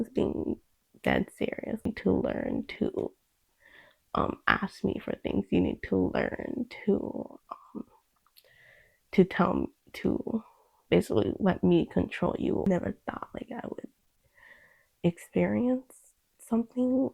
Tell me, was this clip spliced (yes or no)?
yes